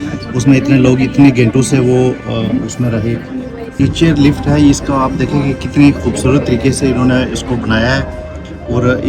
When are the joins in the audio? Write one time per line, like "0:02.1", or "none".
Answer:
0:03.8